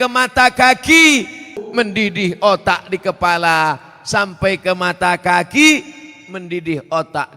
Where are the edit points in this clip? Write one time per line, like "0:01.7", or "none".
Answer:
0:01.5